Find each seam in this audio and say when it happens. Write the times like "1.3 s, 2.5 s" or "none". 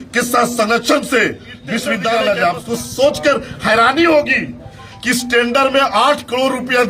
2.0 s